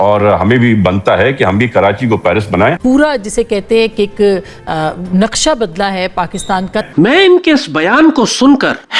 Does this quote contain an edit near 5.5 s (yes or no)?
no